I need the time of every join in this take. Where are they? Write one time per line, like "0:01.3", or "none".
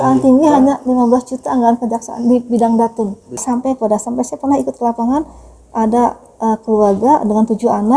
0:03.4